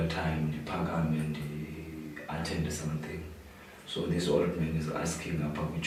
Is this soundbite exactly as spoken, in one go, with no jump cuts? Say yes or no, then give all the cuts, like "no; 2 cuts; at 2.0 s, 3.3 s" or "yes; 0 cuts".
yes; 0 cuts